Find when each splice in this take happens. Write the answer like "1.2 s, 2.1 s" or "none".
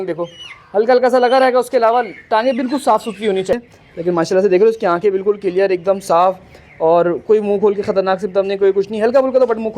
3.6 s